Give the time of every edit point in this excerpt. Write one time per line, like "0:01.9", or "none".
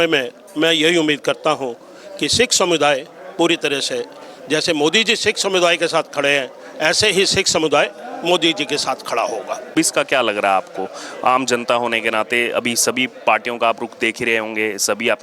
0:09.7